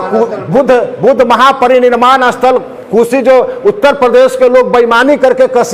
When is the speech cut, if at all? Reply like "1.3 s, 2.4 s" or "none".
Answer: none